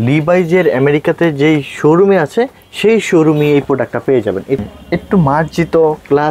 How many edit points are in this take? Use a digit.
1